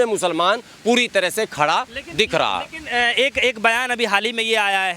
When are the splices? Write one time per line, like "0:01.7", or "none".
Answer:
none